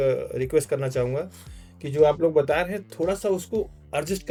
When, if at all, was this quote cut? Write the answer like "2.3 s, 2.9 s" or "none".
none

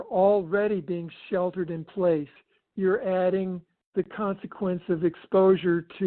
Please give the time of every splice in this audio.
2.4 s

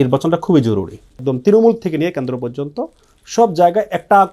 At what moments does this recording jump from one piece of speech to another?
1.3 s

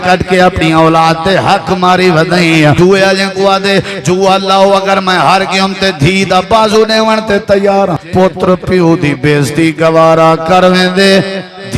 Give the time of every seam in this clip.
2.8 s, 8.0 s

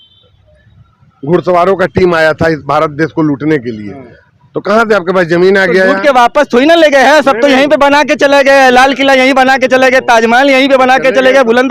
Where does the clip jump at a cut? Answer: none

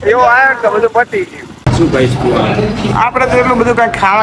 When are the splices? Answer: 1.5 s

